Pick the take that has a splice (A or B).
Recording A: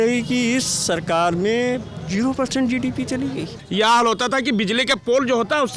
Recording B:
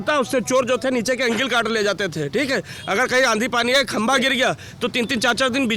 A